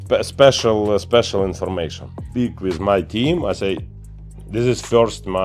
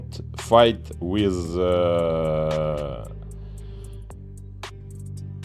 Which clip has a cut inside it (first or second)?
first